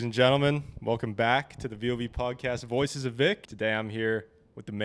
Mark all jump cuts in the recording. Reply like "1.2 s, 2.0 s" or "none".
3.5 s